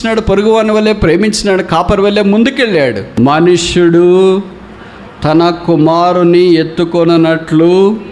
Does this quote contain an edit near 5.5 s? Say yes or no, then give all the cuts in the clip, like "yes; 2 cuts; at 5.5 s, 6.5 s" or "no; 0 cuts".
no; 1 cut; at 3.0 s